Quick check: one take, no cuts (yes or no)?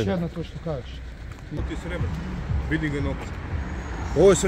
no